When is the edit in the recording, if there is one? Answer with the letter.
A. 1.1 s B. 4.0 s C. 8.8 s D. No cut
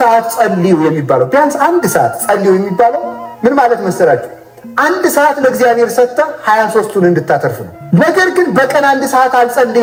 D